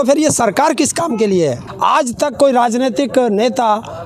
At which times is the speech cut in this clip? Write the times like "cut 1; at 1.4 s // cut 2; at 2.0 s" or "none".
cut 1; at 1.7 s